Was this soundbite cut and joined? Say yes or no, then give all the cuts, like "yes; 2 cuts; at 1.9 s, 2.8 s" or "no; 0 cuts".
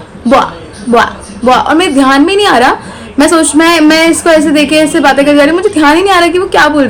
no; 0 cuts